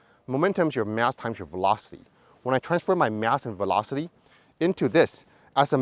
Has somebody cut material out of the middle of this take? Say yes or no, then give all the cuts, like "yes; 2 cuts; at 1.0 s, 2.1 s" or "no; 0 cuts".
no; 0 cuts